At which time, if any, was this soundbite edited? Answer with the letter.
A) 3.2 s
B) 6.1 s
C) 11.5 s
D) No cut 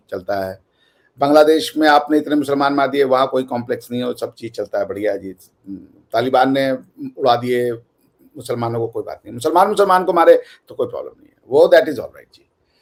D